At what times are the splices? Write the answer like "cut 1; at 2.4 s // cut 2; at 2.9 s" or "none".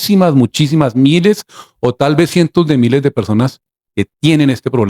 none